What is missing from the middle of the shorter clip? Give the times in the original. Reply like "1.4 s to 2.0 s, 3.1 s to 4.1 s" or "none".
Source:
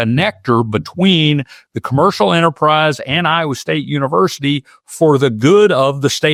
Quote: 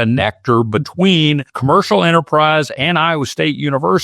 1.5 s to 1.8 s

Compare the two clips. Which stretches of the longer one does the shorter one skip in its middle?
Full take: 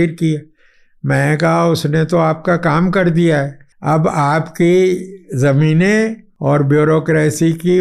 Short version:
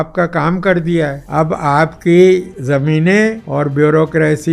3.5 s to 3.7 s, 5.1 s to 5.3 s, 6.2 s to 6.4 s

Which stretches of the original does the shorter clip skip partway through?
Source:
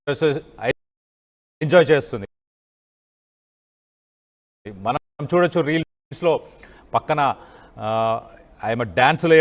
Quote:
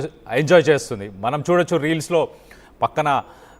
2.5 s to 5.1 s, 5.9 s to 6.2 s

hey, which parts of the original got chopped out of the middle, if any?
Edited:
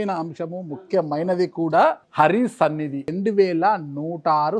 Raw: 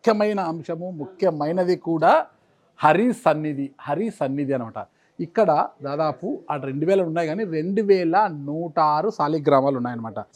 2.3 s to 2.7 s, 3.7 s to 7.6 s

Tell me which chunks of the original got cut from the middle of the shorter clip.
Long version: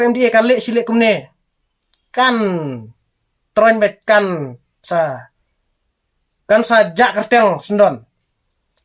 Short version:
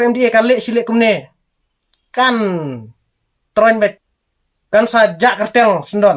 4.0 s to 5.7 s

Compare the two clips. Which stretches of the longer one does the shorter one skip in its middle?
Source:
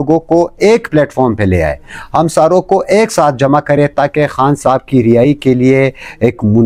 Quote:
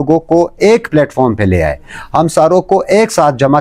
none

